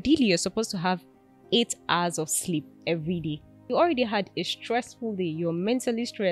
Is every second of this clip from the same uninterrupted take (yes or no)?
no